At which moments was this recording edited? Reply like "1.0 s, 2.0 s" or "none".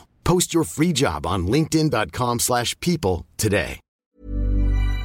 4.1 s